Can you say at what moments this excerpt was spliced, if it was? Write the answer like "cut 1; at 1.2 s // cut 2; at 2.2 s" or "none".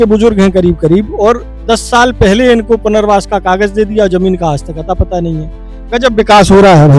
none